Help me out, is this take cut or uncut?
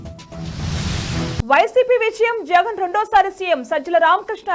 cut